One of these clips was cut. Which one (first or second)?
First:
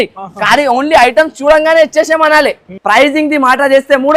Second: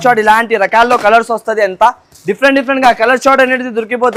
first